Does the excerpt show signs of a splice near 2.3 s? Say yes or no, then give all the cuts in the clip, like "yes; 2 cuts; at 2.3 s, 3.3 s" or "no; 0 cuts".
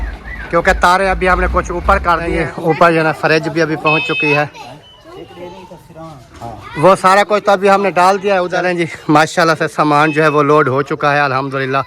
yes; 2 cuts; at 2.3 s, 8.6 s